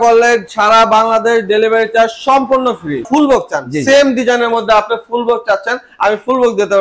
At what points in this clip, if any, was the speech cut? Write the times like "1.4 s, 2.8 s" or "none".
3.1 s